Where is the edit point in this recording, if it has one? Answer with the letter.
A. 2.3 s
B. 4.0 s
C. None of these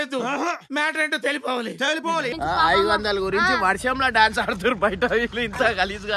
A